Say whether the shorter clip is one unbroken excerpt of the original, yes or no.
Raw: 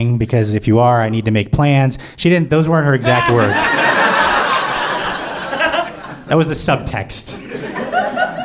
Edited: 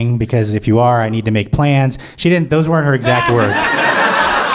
yes